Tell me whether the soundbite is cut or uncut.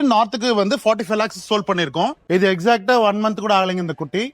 cut